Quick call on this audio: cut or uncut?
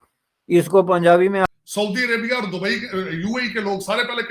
cut